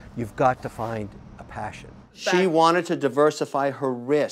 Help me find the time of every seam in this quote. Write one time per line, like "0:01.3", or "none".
0:02.1